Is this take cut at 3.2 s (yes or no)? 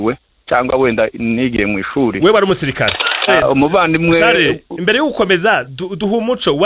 yes